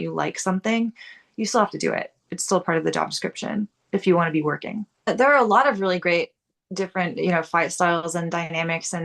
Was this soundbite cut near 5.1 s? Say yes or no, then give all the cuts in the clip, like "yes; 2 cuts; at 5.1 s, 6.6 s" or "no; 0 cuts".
yes; 1 cut; at 5.1 s